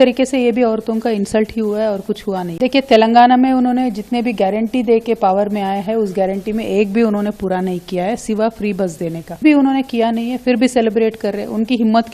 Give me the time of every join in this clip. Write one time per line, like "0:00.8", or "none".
0:02.5
0:09.4